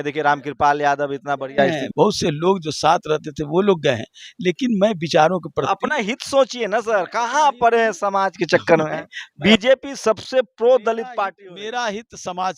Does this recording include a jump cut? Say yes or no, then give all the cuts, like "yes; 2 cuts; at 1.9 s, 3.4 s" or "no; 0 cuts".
yes; 1 cut; at 1.8 s